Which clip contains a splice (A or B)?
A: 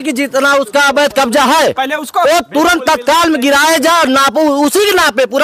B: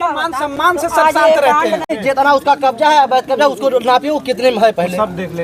B